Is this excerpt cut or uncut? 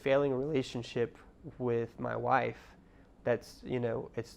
uncut